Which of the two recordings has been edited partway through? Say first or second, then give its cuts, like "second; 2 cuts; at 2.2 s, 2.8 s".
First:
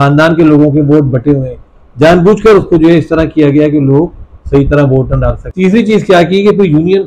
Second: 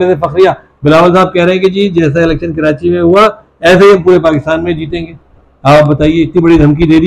first; 1 cut; at 5.4 s